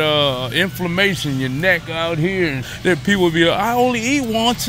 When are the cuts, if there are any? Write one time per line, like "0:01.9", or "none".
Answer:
0:02.7